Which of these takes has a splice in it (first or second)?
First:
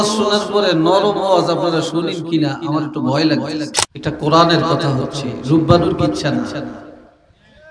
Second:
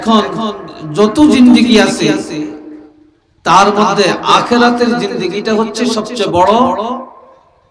first